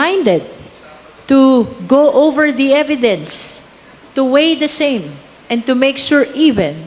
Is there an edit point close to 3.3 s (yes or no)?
no